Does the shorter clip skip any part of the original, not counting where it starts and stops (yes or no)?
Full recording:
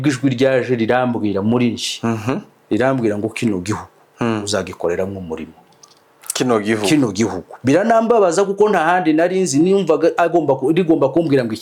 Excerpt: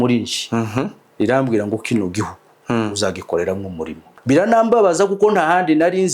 yes